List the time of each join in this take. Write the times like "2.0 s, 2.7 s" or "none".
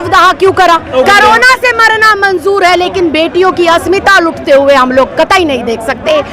0.9 s